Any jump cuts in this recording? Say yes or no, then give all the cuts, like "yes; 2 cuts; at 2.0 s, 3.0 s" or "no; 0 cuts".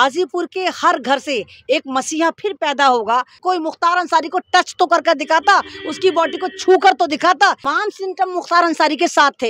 yes; 2 cuts; at 3.4 s, 7.7 s